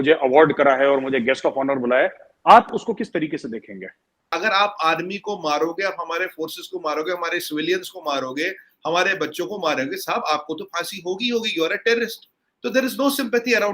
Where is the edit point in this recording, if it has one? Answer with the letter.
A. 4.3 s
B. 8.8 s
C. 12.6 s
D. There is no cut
A